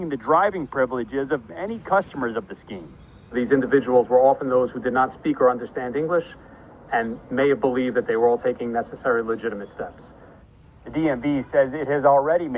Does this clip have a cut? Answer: no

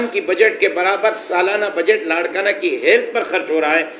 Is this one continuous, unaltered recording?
yes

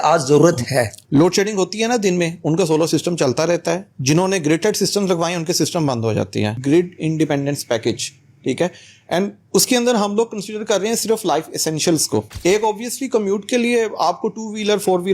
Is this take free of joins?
no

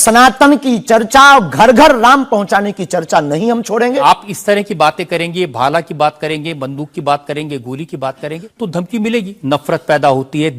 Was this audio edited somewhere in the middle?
yes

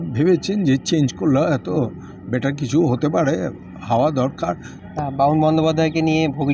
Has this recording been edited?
yes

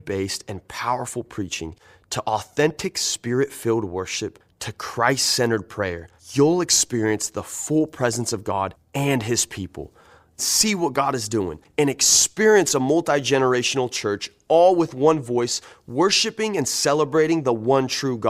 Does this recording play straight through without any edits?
yes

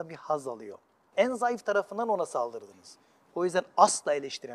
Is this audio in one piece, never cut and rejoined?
no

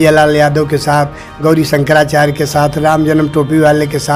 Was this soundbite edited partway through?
no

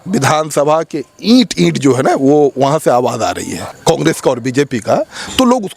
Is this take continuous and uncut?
no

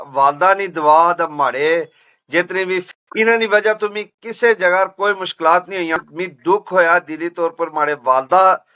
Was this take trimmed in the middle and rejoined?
yes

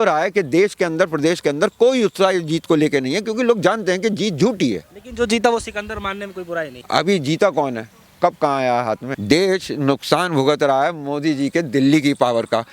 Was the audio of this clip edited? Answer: yes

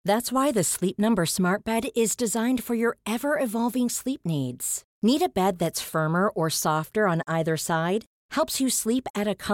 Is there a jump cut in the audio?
no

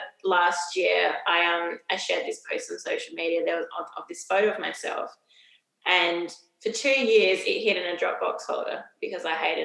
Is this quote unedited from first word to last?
yes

